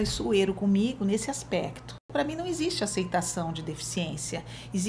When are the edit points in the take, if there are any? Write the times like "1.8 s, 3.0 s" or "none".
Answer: 2.1 s